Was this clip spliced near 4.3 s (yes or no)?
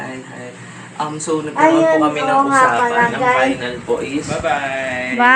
yes